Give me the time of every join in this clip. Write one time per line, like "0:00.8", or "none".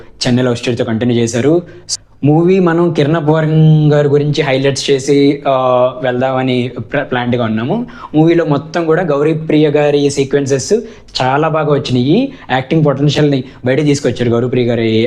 0:01.8